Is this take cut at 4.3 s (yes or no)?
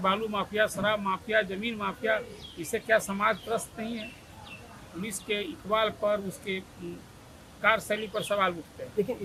no